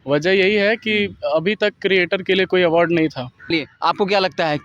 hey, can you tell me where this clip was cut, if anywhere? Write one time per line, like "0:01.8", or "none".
0:03.5